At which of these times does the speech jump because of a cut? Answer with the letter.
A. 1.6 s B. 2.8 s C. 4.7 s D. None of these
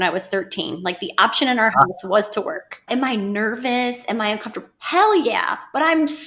B